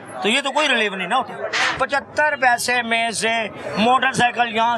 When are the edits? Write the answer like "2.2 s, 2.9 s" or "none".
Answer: 1.8 s